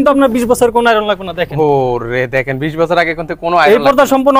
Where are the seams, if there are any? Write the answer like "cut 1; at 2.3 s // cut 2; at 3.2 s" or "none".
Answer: none